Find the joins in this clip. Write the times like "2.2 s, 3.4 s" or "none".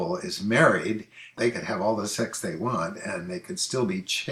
none